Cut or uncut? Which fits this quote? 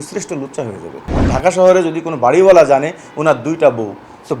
cut